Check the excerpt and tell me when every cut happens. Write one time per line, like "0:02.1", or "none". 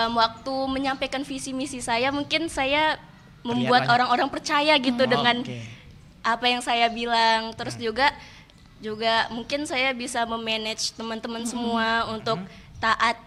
none